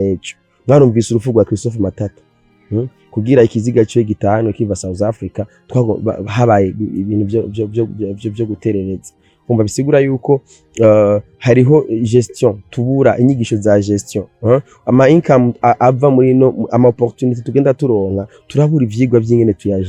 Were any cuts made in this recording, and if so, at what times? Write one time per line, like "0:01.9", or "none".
none